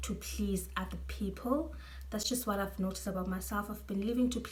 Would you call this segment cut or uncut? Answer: uncut